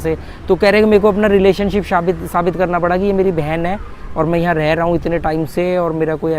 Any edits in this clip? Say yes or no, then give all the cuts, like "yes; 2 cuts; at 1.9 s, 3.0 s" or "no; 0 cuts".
no; 0 cuts